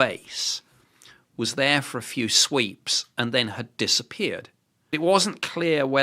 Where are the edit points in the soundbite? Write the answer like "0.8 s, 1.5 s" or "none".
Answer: 4.9 s